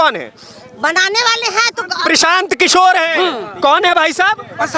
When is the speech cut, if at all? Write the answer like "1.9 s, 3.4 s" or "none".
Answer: none